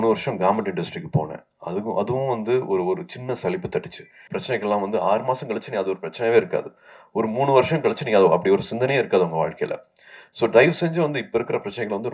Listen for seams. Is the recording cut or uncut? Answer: cut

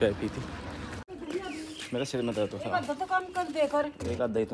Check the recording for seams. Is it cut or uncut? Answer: cut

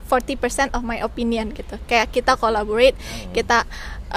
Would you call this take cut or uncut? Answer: uncut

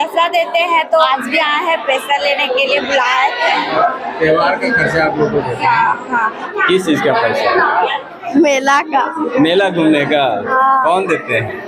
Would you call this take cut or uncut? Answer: cut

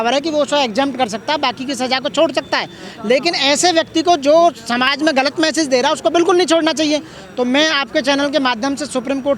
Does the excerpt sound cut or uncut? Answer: uncut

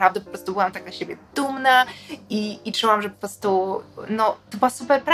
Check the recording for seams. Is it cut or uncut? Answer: uncut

